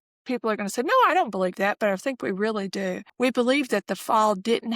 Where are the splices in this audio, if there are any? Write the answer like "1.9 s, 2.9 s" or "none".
3.0 s